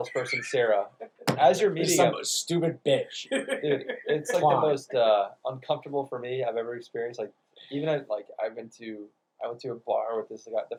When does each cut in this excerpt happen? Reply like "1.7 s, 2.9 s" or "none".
none